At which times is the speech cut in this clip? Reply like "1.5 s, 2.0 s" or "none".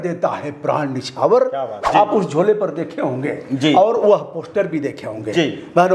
1.8 s